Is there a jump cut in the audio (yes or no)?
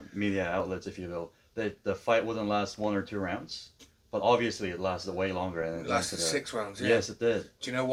no